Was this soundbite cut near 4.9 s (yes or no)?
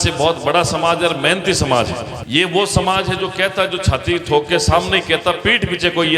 no